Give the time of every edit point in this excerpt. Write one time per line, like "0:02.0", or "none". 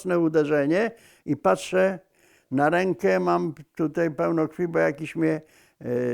none

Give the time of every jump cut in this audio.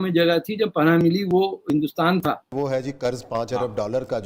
0:02.7

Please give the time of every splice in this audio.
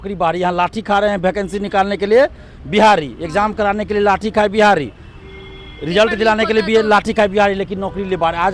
none

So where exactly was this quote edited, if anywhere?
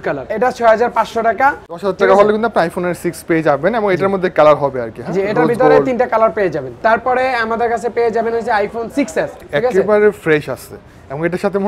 0:01.7
0:09.5

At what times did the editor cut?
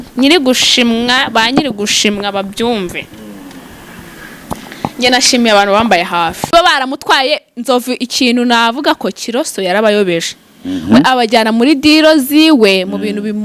0:06.5

